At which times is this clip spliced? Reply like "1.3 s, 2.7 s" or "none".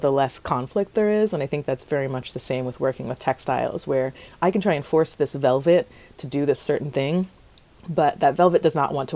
none